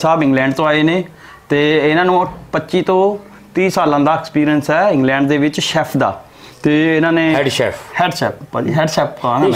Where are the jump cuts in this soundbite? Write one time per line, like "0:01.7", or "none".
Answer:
none